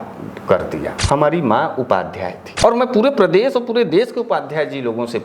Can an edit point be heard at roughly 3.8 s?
no; 2 cuts; at 0.9 s, 2.4 s

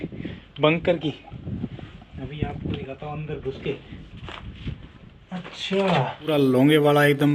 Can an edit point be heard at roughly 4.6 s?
no; 1 cut; at 6.3 s

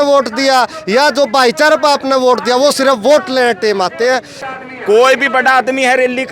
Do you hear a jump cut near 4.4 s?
yes; 1 cut; at 4.4 s

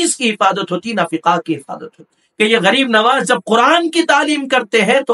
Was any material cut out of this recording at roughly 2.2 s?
yes; 1 cut; at 2.2 s

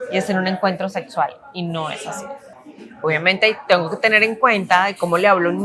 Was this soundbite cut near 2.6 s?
yes; 1 cut; at 2.6 s

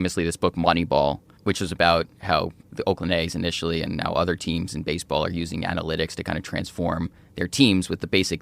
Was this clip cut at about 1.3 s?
yes; 2 cuts; at 1.3 s, 2.7 s

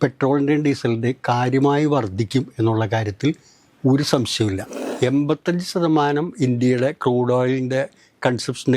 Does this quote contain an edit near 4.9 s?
yes; 1 cut; at 4.9 s

